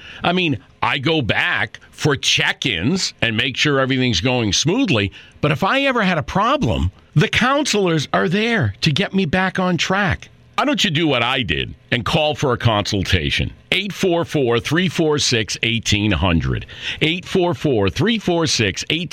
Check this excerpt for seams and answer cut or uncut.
uncut